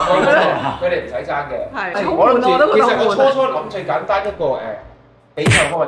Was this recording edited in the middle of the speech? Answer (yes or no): yes